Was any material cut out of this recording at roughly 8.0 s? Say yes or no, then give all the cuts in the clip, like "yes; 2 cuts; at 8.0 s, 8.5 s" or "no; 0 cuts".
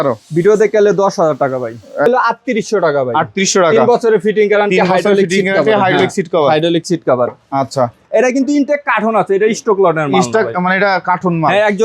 yes; 2 cuts; at 2.1 s, 8.0 s